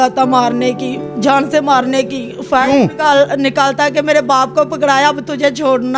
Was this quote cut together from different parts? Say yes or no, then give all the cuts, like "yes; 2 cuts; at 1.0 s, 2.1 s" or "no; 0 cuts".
no; 0 cuts